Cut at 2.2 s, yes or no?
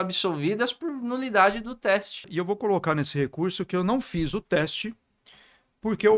yes